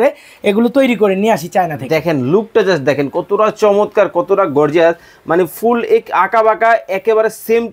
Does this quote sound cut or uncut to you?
uncut